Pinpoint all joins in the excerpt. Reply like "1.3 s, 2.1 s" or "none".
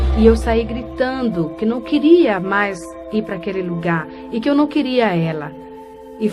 5.4 s